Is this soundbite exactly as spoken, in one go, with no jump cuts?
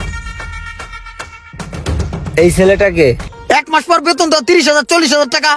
no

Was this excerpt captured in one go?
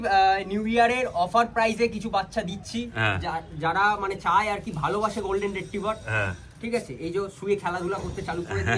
yes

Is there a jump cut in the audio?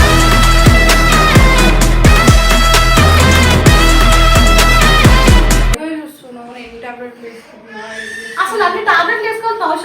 yes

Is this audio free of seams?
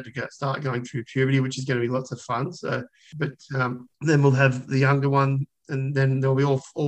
no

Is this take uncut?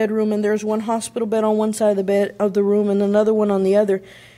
yes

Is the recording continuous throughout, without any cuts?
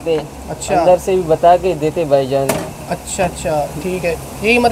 yes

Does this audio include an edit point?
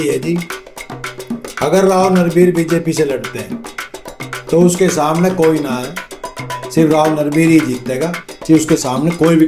no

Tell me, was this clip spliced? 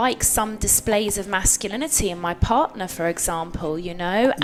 no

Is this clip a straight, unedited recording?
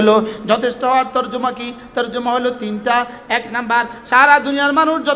yes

